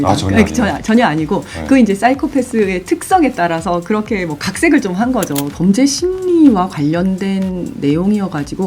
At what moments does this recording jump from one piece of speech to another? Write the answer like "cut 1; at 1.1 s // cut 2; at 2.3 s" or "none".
cut 1; at 5.4 s